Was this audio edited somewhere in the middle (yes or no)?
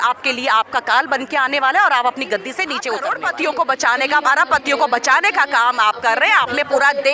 yes